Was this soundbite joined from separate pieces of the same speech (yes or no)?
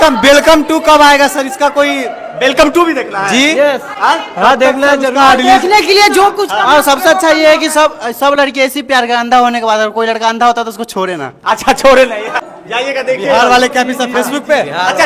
no